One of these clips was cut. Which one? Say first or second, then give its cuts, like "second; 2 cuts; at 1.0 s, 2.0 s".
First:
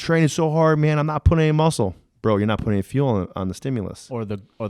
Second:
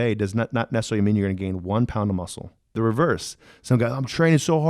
second; 1 cut; at 2.7 s